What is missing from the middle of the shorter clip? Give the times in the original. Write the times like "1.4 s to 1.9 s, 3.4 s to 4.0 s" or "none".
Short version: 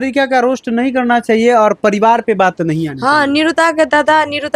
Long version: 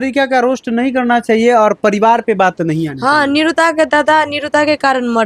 none